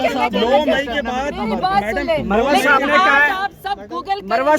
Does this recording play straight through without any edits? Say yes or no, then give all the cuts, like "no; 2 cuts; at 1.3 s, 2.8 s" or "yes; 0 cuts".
yes; 0 cuts